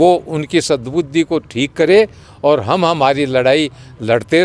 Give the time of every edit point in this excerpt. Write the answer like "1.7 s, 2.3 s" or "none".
none